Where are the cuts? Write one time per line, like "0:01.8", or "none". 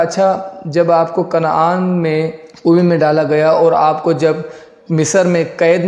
0:02.4